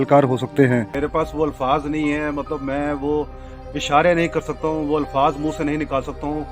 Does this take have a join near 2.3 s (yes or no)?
no